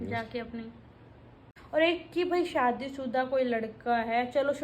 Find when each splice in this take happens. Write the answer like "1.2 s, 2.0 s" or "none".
1.5 s